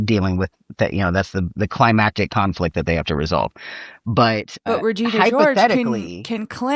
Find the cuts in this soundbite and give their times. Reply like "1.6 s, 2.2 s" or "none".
4.6 s